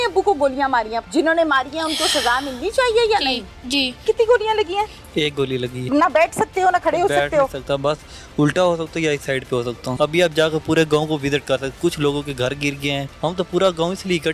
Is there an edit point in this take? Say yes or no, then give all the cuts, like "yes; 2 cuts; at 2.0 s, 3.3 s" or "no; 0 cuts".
yes; 5 cuts; at 1.0 s, 4.0 s, 5.9 s, 9.9 s, 13.1 s